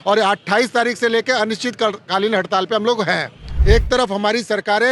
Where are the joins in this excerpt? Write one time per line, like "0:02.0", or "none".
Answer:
0:03.5